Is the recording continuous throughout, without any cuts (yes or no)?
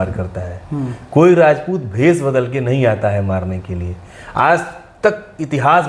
yes